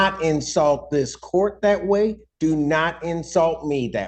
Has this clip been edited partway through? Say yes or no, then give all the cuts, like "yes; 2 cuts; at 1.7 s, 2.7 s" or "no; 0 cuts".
no; 0 cuts